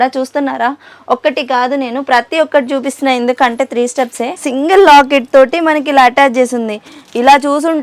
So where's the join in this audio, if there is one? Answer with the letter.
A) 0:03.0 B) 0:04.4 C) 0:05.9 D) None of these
B